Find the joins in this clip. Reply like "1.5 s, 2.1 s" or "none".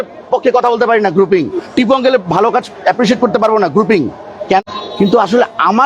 4.6 s